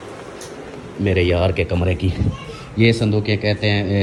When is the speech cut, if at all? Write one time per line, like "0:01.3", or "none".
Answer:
none